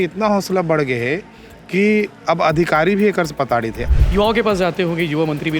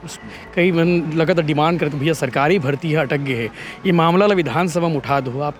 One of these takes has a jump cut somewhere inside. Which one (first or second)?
first